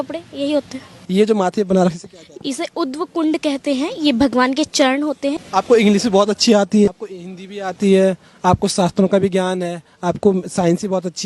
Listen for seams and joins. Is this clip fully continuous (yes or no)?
no